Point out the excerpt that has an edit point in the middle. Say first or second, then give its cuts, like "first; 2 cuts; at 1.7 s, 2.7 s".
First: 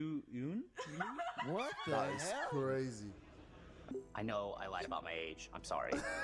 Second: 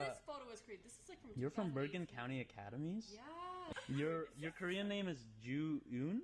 first; 1 cut; at 3.9 s